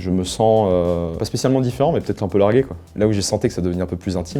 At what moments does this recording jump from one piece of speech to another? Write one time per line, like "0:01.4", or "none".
0:01.2
0:02.8